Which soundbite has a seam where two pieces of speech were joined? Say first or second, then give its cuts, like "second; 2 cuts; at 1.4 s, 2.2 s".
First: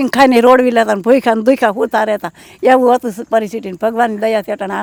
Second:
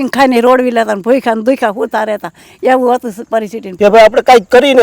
second; 1 cut; at 3.7 s